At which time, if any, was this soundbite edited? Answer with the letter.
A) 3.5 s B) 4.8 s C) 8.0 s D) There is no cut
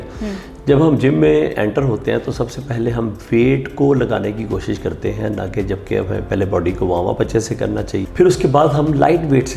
C